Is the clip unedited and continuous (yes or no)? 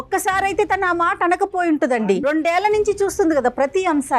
no